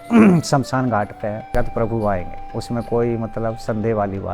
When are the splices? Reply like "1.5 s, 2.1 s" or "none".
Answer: 1.5 s